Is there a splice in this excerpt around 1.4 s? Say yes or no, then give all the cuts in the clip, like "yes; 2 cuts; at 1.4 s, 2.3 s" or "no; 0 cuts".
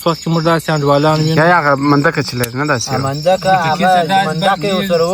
yes; 1 cut; at 1.4 s